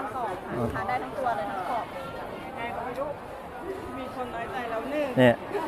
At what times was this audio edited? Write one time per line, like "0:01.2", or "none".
0:02.4